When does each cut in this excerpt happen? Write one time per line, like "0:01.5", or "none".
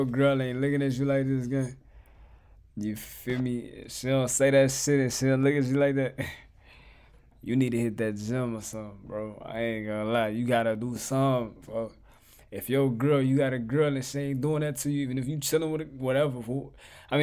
none